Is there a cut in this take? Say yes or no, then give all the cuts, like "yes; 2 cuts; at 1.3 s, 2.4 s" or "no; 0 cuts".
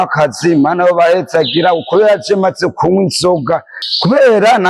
yes; 1 cut; at 3.8 s